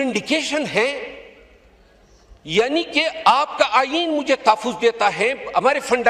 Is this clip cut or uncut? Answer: uncut